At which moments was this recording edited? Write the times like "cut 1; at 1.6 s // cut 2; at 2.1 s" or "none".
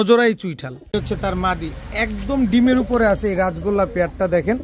cut 1; at 0.9 s